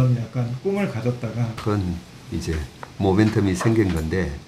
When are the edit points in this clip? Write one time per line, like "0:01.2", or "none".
0:01.5